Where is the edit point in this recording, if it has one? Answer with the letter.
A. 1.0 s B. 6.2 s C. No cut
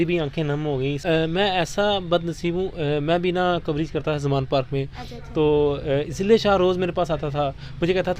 A